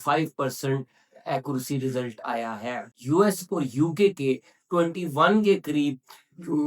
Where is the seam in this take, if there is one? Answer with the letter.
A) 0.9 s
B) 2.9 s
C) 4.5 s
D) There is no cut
B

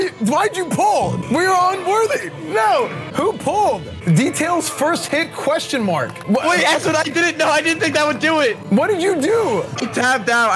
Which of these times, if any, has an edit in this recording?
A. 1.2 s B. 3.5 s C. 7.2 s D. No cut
A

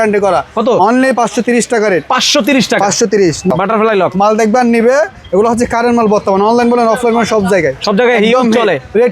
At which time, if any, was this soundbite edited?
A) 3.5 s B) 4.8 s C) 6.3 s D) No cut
A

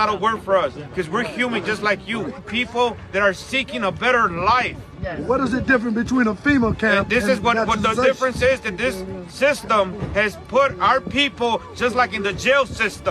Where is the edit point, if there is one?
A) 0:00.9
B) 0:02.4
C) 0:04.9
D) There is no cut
B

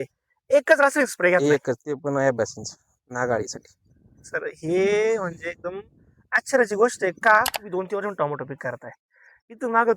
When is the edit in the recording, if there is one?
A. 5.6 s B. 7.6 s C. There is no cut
B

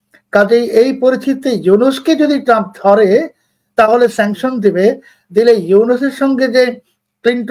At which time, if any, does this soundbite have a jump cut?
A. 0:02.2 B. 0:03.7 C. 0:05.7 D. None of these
D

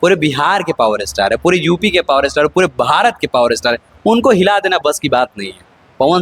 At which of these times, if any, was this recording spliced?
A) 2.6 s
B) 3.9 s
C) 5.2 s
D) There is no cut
D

